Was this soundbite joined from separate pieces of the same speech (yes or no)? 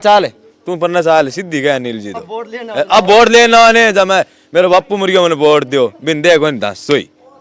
no